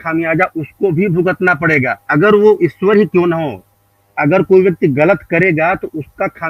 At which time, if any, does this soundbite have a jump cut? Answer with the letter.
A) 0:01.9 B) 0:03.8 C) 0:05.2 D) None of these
D